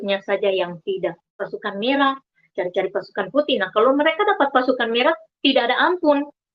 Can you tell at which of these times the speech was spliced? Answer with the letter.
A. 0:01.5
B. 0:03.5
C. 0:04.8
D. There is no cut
A